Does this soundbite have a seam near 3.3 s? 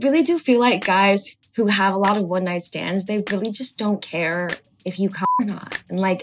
no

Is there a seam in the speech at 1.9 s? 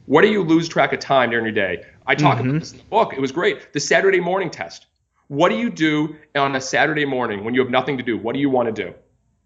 yes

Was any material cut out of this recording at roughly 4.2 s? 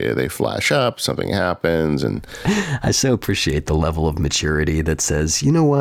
no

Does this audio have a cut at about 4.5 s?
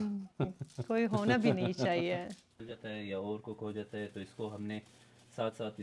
no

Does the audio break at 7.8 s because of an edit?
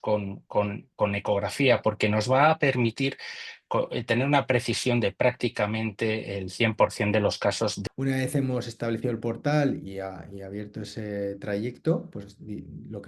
yes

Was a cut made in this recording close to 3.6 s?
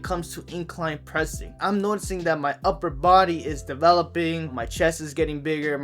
no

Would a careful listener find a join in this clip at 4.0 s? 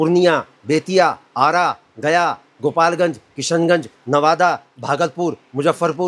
no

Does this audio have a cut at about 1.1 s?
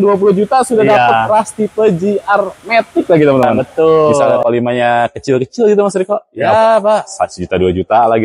no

